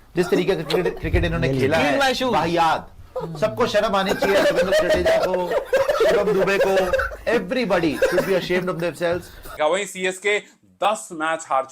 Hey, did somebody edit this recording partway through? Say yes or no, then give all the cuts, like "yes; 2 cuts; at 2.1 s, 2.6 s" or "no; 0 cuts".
yes; 1 cut; at 9.4 s